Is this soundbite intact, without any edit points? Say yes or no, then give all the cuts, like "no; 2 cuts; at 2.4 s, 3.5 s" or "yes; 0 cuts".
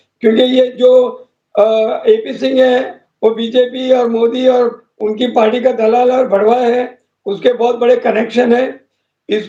yes; 0 cuts